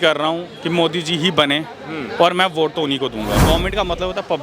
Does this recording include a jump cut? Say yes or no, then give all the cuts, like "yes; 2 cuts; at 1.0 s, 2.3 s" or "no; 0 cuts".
yes; 1 cut; at 3.4 s